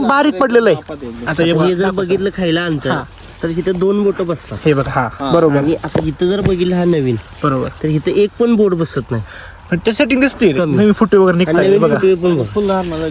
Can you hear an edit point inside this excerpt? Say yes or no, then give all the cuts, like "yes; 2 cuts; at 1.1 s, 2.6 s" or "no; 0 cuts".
no; 0 cuts